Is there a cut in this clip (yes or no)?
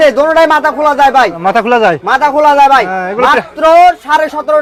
no